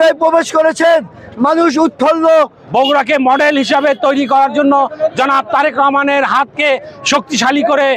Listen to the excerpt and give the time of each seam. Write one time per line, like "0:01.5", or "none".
0:02.6